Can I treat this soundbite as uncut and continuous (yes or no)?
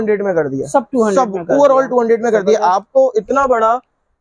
yes